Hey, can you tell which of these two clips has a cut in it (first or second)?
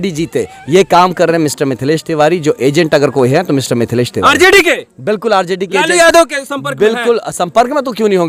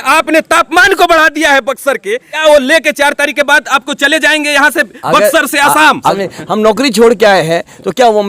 second